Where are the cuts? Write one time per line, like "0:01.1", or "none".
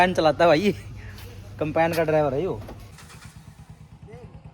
0:03.0